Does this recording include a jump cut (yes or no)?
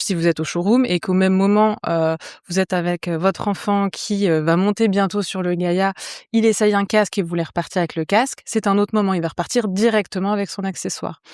no